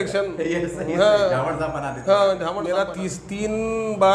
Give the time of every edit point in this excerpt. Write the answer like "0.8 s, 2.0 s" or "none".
2.6 s